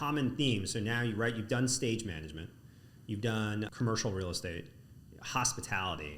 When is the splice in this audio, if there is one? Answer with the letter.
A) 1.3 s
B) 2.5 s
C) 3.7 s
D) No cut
C